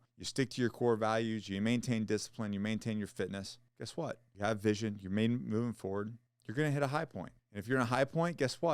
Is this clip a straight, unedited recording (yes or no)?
yes